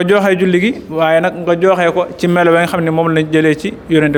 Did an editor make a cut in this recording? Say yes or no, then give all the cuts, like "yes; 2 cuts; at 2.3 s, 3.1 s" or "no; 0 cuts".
no; 0 cuts